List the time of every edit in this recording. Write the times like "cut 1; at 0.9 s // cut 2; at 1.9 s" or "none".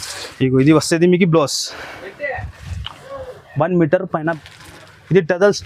cut 1; at 4.3 s